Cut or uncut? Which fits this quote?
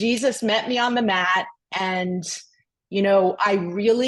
uncut